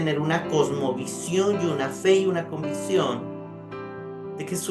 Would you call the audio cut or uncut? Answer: uncut